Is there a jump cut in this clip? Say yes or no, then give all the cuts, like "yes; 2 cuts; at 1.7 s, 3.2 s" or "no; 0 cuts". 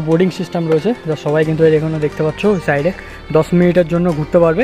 no; 0 cuts